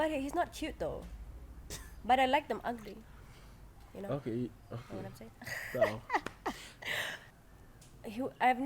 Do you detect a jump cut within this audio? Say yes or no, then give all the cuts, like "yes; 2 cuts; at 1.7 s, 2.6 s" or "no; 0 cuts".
yes; 1 cut; at 7.2 s